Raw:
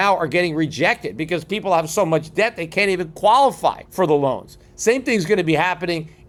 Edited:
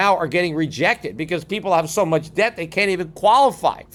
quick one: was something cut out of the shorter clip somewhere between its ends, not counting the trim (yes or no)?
no